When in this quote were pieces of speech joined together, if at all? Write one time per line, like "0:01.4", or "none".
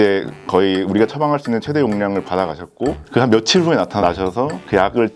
none